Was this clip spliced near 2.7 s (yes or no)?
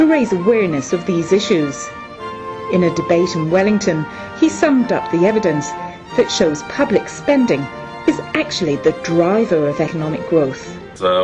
no